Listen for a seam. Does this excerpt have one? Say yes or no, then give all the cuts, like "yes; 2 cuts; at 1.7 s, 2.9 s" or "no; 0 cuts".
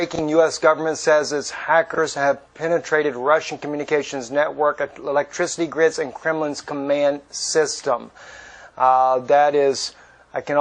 yes; 1 cut; at 4.3 s